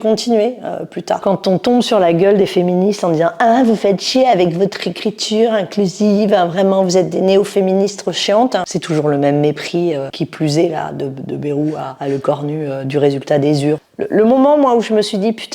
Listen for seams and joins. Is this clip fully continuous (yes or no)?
no